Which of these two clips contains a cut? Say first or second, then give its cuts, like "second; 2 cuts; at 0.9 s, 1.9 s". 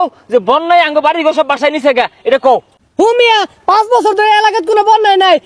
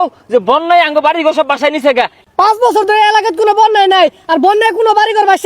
second; 1 cut; at 2.2 s